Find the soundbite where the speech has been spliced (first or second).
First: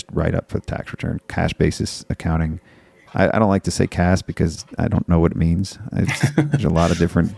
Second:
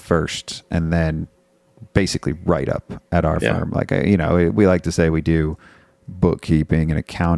first